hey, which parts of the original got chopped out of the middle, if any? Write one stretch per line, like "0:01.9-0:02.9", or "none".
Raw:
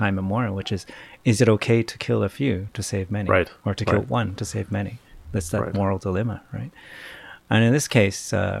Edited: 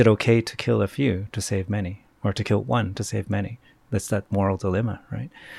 none